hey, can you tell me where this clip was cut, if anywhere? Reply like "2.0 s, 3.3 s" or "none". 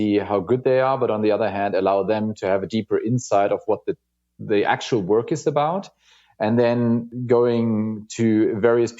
7.1 s